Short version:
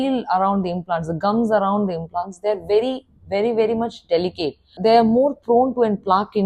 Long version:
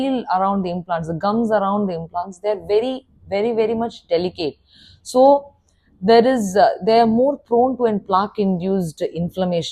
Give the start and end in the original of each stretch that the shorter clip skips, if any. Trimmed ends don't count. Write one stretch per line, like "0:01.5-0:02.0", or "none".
0:04.8-0:06.8

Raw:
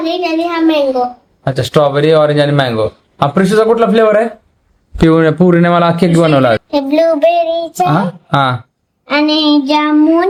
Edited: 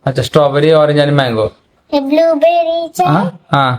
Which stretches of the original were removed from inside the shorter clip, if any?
0:03.2-0:06.6

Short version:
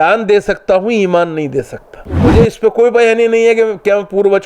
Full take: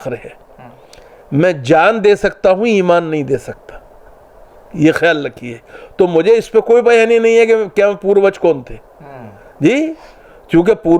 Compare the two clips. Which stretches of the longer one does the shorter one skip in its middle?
0:04.0-0:06.2

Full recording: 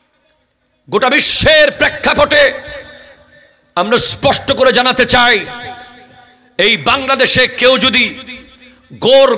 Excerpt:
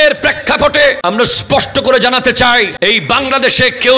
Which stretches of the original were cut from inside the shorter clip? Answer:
0:02.5-0:03.7
0:05.5-0:06.5

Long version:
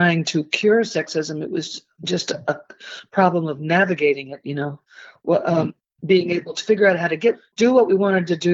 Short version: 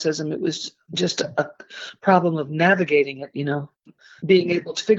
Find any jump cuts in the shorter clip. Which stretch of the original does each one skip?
0:05.1-0:05.8

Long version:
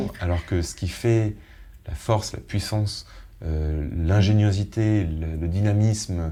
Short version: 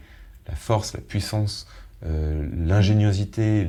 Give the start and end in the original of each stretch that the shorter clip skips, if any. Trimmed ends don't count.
none

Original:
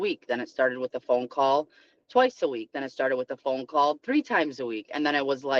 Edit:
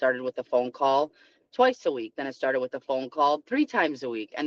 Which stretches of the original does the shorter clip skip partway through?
none

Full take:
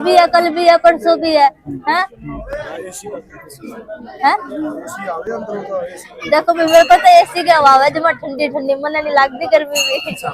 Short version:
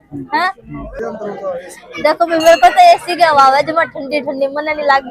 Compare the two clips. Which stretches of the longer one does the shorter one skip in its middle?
0:02.5-0:05.2

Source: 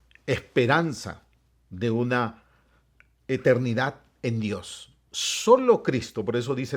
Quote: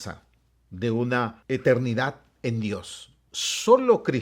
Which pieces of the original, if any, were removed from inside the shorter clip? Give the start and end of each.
0:02.4-0:03.2

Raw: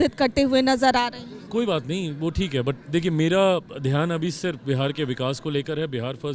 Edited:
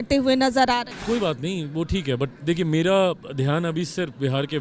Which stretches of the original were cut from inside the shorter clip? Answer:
0:01.2-0:01.4

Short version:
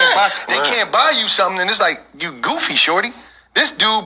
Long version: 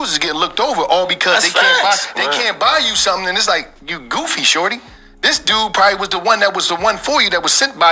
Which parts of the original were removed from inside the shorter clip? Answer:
none

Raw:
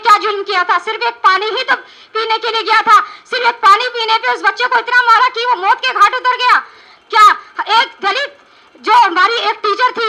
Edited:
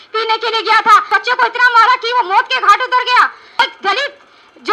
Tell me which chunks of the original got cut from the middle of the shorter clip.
0:03.1-0:04.4
0:06.9-0:07.8

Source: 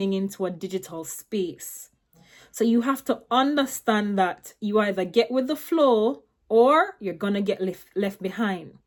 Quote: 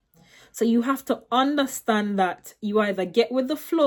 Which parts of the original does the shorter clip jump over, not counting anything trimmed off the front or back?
none

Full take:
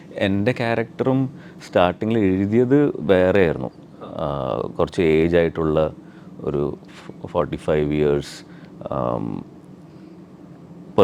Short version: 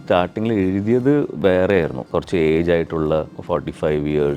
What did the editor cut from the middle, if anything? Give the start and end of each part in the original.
0:03.7-0:04.7
0:06.0-0:07.2

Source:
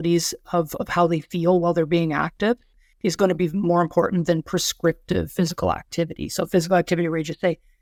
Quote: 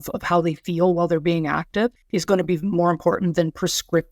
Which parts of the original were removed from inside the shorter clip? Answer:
0:02.7-0:02.9

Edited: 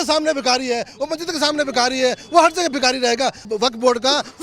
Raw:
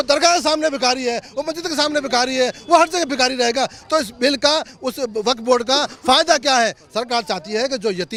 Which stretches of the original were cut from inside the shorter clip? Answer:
0:03.8-0:05.1

